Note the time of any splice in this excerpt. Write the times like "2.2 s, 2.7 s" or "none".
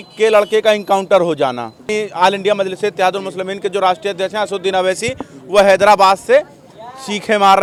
none